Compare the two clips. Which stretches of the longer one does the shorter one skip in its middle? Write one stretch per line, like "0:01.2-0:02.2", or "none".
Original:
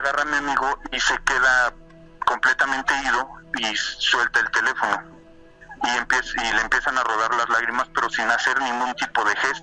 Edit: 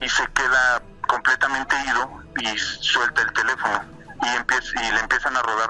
0:01.8-0:02.1
0:05.2-0:05.6